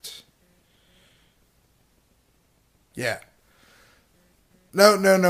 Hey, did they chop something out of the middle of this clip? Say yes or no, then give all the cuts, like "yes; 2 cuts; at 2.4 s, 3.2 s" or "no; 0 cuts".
yes; 1 cut; at 4.1 s